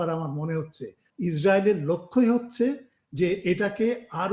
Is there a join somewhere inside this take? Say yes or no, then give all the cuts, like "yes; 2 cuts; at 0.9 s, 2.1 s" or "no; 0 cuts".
yes; 1 cut; at 1.0 s